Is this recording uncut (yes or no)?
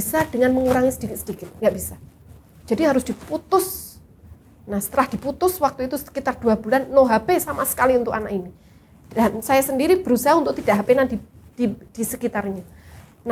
yes